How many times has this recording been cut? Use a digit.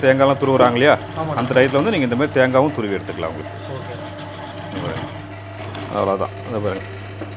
1